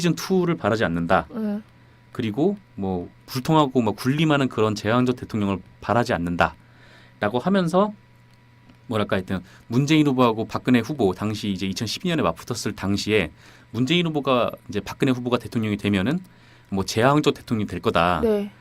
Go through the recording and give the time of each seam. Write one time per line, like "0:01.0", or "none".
0:14.9